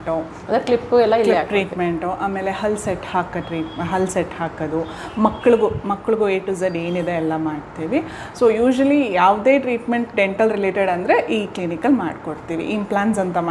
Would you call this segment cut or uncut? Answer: uncut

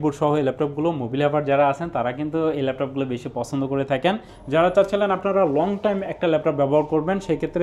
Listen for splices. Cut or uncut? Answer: cut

